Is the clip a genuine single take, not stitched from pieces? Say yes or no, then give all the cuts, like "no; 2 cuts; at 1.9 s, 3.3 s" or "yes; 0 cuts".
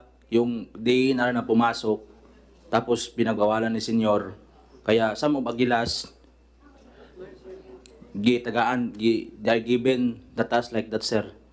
yes; 0 cuts